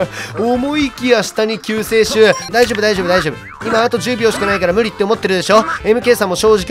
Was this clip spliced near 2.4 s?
yes; 1 cut; at 2.4 s

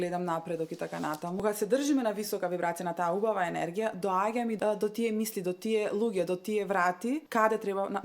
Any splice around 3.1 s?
no; 3 cuts; at 1.4 s, 4.6 s, 7.2 s

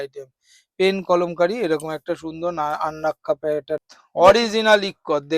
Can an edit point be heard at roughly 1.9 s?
no; 1 cut; at 3.8 s

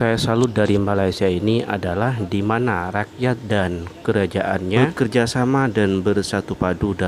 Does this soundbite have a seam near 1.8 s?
no; 1 cut; at 4.8 s

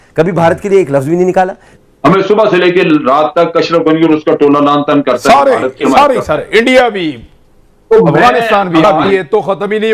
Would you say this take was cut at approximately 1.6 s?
yes; 2 cuts; at 1.6 s, 9.1 s

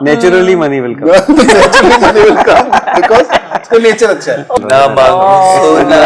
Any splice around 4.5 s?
yes; 1 cut; at 4.5 s

